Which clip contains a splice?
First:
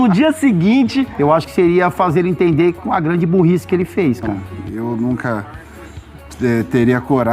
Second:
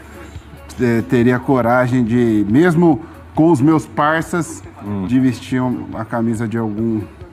first; 2 cuts; at 1.1 s, 4.3 s

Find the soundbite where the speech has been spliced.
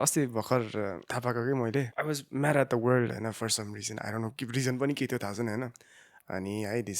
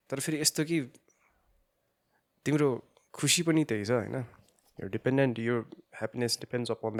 first; 2 cuts; at 1.0 s, 1.9 s

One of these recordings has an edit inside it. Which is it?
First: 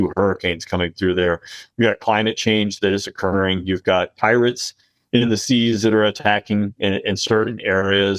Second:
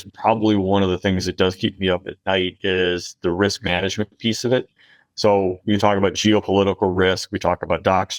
first; 1 cut; at 4.1 s

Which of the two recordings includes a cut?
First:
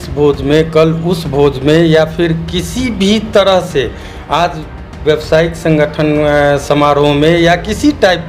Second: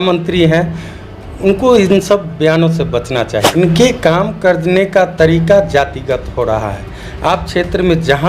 second; 1 cut; at 3.4 s

